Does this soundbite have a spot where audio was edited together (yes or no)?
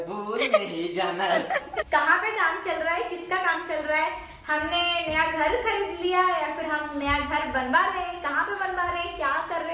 yes